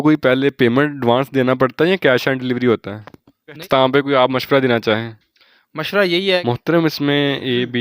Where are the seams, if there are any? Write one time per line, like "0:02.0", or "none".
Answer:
0:03.6
0:06.4